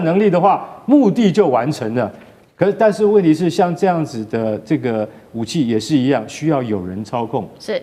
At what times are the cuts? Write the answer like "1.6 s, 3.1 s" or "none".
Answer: none